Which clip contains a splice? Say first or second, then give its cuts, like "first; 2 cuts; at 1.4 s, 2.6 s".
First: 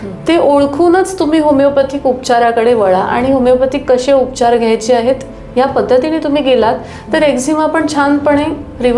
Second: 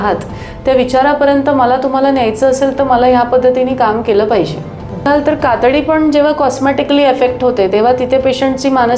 second; 1 cut; at 5.1 s